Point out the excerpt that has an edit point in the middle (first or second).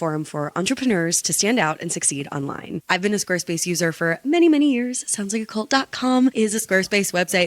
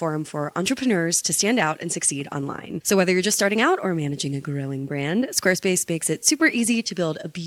first